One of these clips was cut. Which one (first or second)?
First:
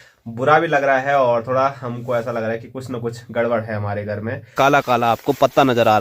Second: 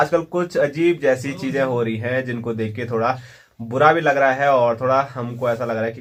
first